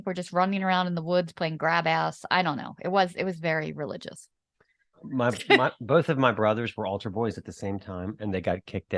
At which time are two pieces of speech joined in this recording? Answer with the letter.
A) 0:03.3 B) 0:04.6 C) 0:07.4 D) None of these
D